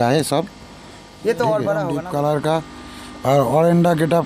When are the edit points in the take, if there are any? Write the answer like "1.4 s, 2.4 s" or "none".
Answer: 2.0 s